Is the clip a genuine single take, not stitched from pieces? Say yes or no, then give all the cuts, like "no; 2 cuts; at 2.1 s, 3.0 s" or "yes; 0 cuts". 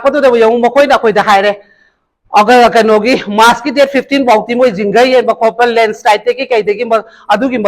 yes; 0 cuts